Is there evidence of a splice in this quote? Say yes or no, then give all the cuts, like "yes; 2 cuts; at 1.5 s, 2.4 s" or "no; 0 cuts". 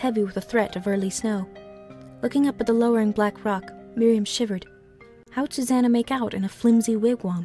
no; 0 cuts